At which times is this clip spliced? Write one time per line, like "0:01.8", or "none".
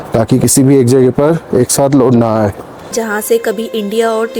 0:02.9